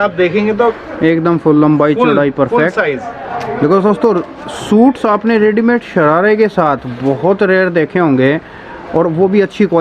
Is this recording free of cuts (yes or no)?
yes